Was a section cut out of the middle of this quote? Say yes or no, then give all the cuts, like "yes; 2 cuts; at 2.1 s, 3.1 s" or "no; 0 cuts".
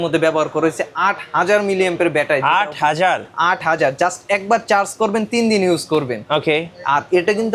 no; 0 cuts